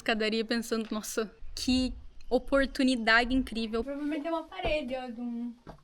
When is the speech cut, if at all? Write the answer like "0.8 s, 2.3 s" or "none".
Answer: 1.4 s, 3.9 s